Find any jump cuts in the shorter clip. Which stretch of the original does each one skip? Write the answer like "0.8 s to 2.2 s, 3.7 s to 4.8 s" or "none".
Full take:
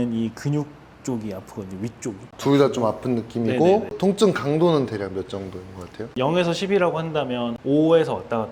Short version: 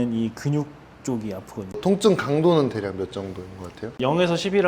1.7 s to 3.9 s